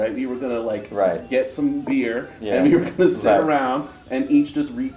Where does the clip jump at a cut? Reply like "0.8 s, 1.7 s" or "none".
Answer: none